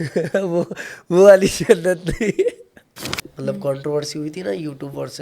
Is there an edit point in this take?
yes; 1 cut; at 3.3 s

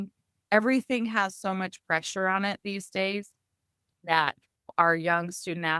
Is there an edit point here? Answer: yes; 1 cut; at 4.7 s

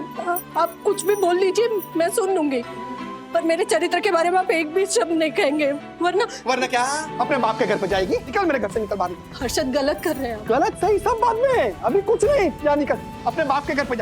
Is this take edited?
yes; 2 cuts; at 7.1 s, 8.3 s

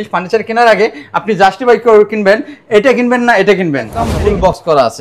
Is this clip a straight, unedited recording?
no; 1 cut; at 4.1 s

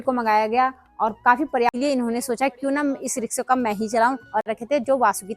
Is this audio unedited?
no; 2 cuts; at 1.7 s, 4.5 s

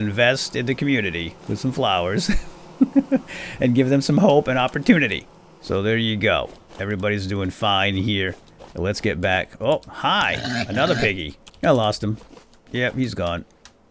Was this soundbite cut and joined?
no; 0 cuts

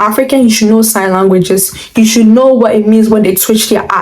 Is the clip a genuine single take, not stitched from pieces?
yes; 0 cuts

